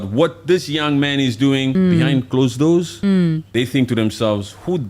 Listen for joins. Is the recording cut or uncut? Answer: cut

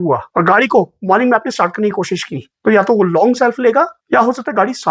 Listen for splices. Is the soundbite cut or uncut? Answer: cut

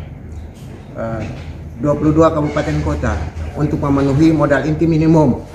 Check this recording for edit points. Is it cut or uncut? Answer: cut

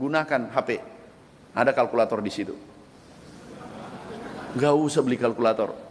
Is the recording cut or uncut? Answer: uncut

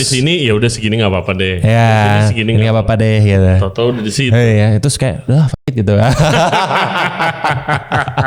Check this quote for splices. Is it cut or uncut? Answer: uncut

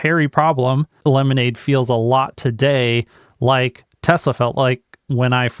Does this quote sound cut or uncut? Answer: cut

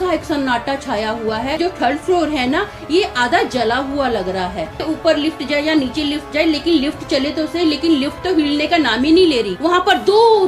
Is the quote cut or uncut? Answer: cut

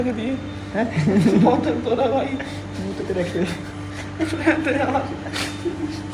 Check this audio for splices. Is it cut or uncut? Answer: uncut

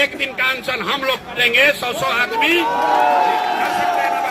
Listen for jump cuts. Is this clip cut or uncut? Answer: uncut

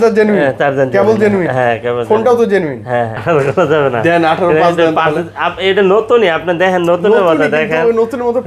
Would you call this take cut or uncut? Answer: cut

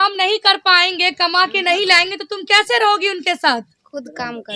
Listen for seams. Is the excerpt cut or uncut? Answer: uncut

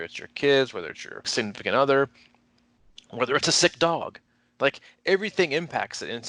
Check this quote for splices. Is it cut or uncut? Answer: cut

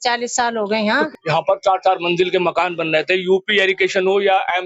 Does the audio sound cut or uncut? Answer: cut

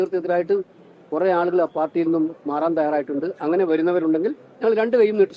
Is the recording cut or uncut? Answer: uncut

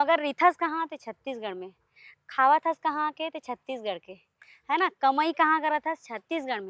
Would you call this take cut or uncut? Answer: uncut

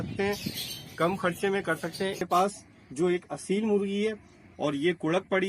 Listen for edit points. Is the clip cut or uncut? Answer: cut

